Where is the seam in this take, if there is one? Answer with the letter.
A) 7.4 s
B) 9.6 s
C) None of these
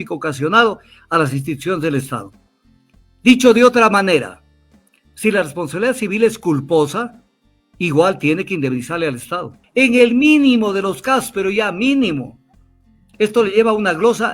B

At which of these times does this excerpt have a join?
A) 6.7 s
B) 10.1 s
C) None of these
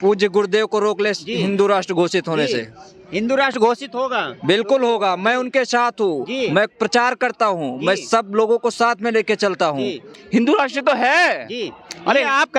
B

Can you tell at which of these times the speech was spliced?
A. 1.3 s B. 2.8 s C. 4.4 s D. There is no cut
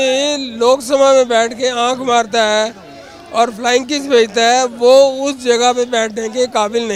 D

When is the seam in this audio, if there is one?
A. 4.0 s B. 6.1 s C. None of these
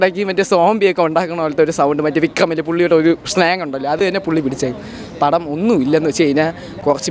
C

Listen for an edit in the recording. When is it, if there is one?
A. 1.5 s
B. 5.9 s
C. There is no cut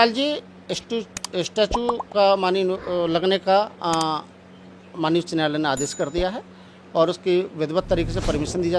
C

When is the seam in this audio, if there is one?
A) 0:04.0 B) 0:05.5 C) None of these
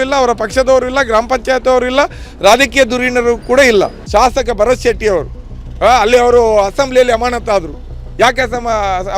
A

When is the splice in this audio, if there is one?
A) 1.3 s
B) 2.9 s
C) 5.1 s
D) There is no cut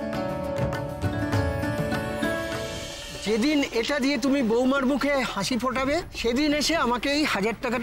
B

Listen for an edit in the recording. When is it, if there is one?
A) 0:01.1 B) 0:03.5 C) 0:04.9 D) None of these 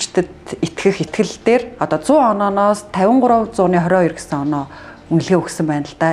A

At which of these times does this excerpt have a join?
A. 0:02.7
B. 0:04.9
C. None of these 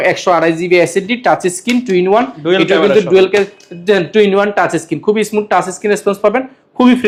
C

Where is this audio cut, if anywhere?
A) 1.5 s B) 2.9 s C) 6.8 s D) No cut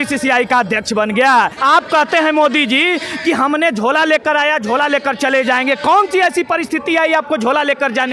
A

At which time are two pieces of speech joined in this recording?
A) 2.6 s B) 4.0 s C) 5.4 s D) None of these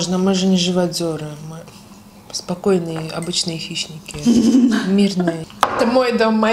C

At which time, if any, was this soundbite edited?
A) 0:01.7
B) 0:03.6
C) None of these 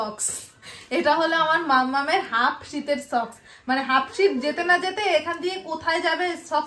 C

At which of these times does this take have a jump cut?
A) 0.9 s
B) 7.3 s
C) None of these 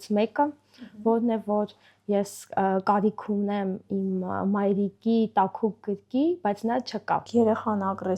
B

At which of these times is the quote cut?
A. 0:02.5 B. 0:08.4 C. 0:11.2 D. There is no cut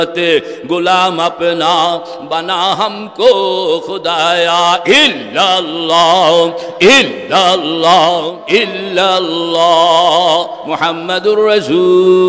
B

